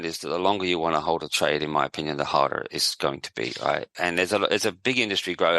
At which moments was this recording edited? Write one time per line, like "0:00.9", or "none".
0:02.8
0:03.9